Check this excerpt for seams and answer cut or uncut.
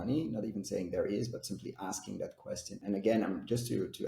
cut